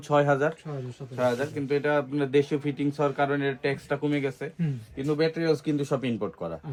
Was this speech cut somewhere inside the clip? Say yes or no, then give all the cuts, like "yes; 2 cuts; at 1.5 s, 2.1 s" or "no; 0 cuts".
no; 0 cuts